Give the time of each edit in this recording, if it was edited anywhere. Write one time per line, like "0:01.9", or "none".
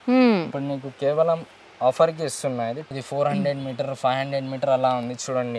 0:02.8